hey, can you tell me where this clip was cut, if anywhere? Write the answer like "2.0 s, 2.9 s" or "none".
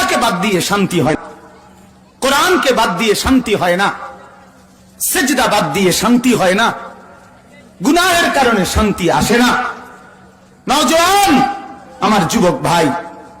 1.1 s